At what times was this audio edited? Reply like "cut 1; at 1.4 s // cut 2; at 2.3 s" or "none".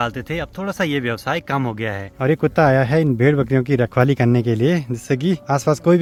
none